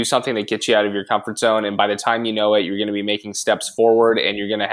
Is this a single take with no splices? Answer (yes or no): yes